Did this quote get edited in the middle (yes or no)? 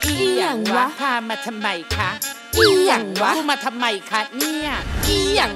no